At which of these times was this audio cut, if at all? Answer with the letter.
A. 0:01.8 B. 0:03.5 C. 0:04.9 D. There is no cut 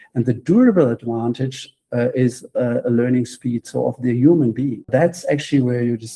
C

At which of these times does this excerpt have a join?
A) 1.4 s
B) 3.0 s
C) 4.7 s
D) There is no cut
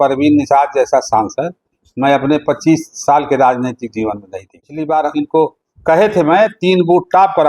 C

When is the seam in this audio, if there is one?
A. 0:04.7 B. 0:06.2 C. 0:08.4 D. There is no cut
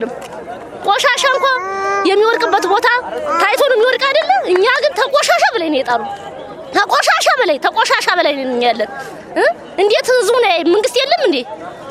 D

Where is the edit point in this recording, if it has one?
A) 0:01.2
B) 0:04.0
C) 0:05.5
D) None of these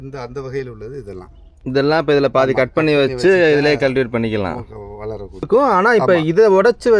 C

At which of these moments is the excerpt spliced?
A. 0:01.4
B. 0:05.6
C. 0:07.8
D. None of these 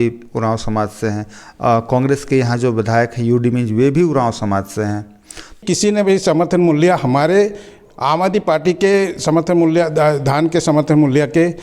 B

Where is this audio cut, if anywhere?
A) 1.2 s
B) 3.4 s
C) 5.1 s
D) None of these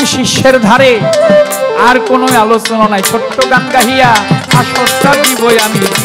D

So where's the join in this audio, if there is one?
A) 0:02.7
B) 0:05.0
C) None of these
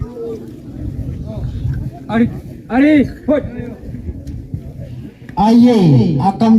B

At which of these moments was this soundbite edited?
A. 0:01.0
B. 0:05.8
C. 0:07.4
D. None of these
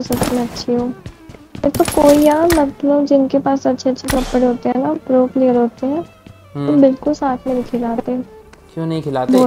D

